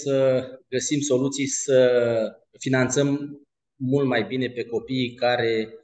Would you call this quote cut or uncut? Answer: cut